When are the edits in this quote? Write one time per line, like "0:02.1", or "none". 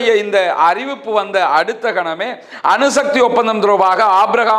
none